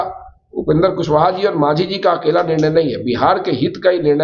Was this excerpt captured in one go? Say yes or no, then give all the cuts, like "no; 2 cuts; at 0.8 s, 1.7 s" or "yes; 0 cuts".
yes; 0 cuts